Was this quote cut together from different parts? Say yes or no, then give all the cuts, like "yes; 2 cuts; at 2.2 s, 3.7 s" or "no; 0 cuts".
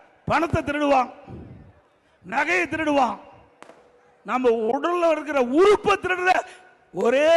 no; 0 cuts